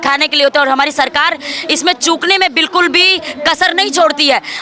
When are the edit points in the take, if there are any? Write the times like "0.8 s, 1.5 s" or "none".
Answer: none